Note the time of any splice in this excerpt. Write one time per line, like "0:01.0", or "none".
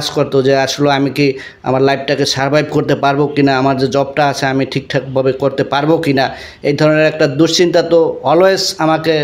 none